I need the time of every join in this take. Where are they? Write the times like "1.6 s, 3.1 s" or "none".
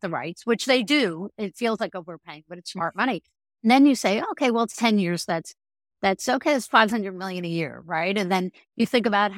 none